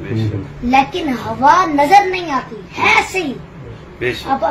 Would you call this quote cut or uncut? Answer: uncut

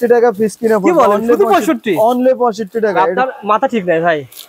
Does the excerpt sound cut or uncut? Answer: uncut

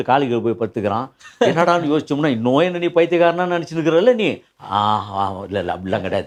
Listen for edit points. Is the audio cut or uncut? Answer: uncut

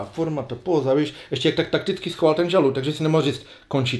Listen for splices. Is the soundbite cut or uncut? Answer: uncut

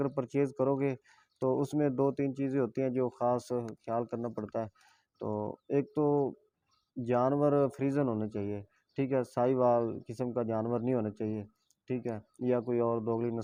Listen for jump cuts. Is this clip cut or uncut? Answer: uncut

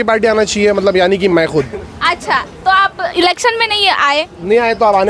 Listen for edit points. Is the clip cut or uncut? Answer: uncut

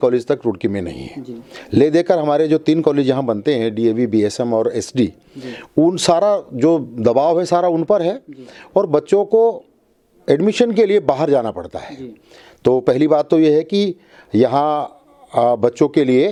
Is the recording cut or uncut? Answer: uncut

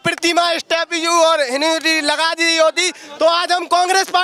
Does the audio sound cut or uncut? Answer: uncut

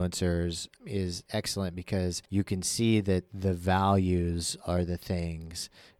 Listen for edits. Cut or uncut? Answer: cut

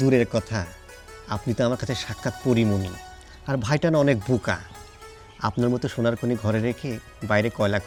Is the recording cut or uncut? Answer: uncut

